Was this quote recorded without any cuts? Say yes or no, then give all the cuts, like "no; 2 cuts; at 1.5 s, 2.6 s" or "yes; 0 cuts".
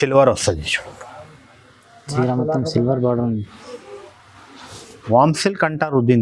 no; 1 cut; at 5.1 s